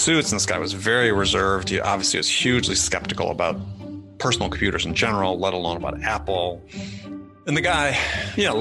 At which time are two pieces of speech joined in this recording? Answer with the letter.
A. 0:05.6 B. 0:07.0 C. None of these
B